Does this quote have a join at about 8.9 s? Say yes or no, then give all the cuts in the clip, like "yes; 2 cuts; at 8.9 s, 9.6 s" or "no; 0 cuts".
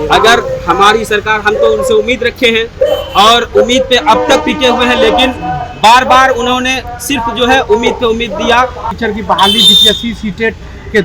yes; 1 cut; at 8.9 s